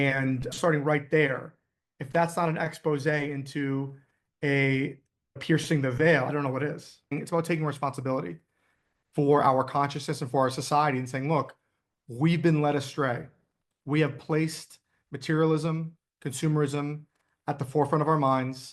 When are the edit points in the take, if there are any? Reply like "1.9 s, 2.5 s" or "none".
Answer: 7.1 s